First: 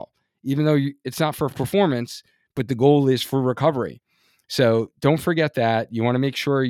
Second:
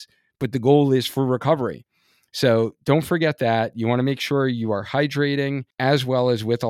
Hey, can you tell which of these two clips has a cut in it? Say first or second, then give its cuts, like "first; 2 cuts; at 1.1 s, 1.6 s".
second; 1 cut; at 5.7 s